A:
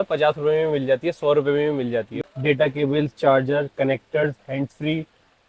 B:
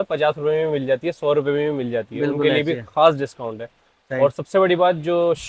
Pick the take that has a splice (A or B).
A